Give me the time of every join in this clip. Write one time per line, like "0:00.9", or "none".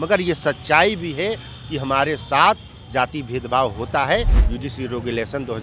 0:04.4